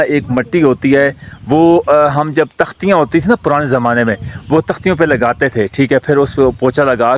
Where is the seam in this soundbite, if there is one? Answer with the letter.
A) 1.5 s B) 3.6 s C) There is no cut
C